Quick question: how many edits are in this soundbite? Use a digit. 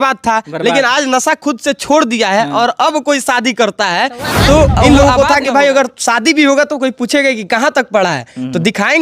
1